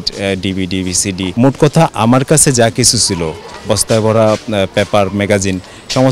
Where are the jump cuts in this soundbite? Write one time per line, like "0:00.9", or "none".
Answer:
0:01.3

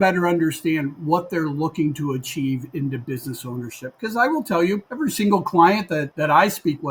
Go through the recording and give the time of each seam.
0:04.9
0:06.1

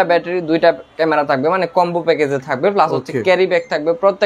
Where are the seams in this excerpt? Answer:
none

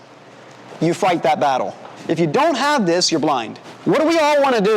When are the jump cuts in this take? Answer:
0:03.6

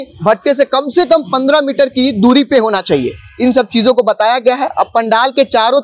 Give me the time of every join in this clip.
none

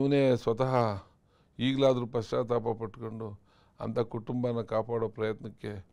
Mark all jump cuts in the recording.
none

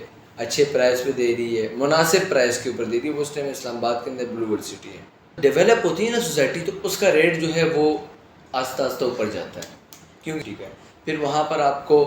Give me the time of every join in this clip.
0:05.3
0:10.3

